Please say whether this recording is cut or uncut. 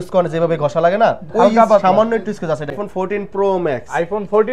cut